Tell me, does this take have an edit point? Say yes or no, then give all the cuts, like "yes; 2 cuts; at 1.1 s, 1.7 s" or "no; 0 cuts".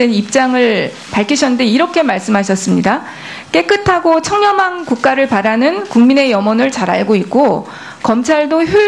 no; 0 cuts